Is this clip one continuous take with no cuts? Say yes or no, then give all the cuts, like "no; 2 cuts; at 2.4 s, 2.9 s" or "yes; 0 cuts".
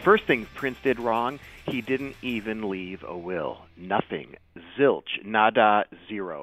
yes; 0 cuts